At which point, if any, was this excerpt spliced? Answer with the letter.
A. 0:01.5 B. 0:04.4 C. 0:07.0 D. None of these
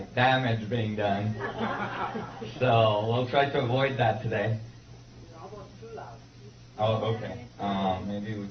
C